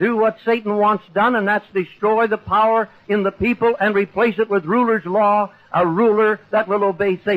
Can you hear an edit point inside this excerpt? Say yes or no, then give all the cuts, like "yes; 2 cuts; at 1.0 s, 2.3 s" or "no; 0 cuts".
yes; 1 cut; at 3.3 s